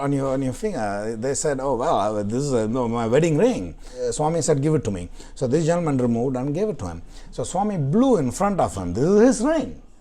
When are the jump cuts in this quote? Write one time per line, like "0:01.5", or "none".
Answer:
0:03.9

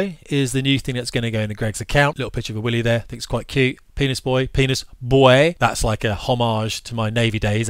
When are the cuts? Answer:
0:02.2
0:05.6

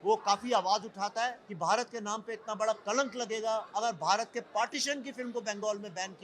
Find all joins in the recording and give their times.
0:01.4

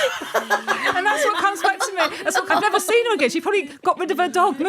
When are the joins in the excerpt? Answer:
0:02.4

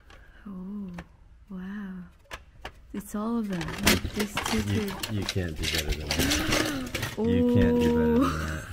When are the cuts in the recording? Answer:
none

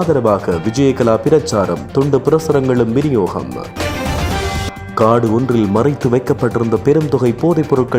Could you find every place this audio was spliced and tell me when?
none

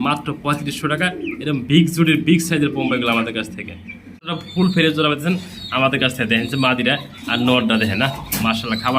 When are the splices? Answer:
0:04.4

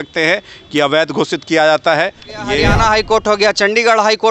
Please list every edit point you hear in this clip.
0:02.6

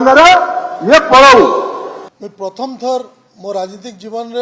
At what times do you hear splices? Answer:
0:02.1

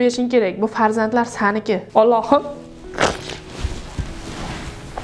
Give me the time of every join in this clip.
0:01.8

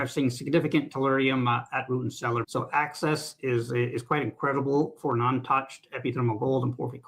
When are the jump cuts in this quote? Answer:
0:02.4

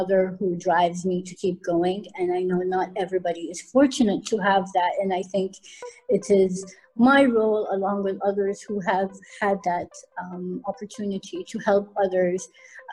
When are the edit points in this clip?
none

